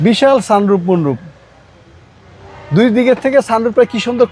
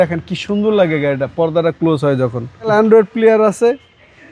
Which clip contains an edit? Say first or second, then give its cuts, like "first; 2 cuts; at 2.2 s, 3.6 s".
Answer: second; 1 cut; at 2.7 s